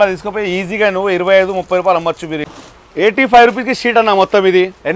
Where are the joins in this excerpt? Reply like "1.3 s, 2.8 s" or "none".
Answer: 2.5 s